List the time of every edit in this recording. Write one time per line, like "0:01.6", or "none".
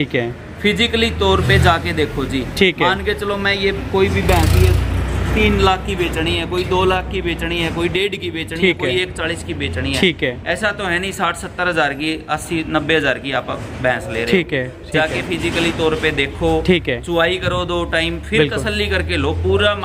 none